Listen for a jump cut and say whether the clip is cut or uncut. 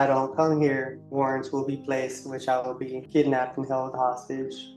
cut